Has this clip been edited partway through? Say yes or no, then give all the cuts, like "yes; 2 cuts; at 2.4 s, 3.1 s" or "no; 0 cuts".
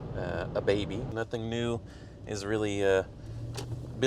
yes; 1 cut; at 1.1 s